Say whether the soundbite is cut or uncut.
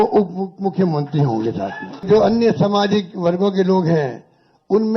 cut